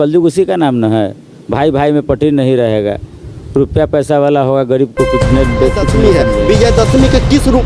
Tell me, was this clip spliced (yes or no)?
yes